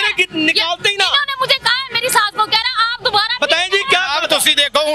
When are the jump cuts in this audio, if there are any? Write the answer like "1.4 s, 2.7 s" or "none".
none